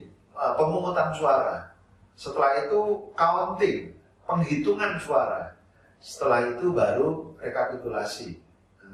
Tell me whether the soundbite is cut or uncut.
uncut